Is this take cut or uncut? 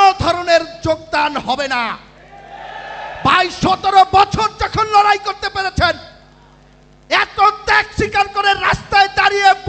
uncut